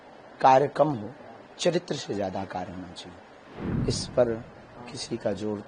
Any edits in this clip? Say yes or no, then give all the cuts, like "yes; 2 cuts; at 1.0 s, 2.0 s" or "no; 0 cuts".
yes; 1 cut; at 3.4 s